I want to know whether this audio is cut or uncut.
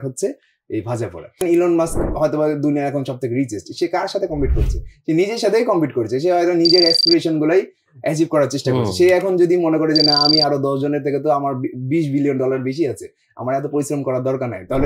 cut